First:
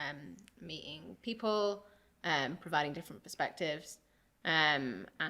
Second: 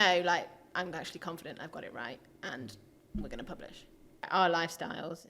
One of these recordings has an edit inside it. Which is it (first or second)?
second